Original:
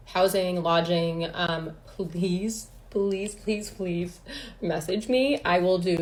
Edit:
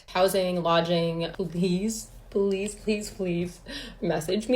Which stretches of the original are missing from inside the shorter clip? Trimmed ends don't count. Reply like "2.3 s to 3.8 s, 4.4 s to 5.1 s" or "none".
1.3 s to 1.9 s